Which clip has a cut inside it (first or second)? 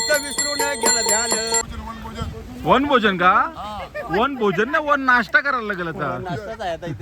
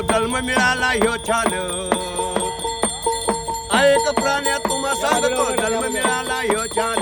first